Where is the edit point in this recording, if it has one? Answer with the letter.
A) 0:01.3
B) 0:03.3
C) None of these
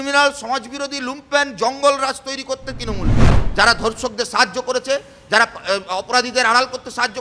B